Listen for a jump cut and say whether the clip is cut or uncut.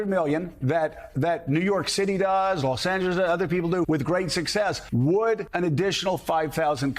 cut